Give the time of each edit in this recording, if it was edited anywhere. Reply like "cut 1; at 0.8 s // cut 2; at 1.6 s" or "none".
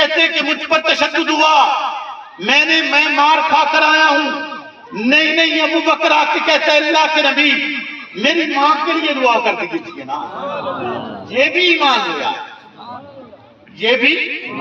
none